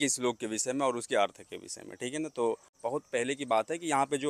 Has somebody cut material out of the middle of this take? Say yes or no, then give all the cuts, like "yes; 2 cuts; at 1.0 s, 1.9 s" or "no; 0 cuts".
yes; 1 cut; at 2.7 s